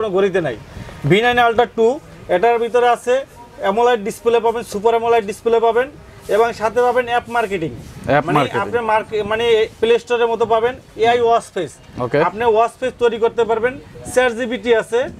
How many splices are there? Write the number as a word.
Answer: zero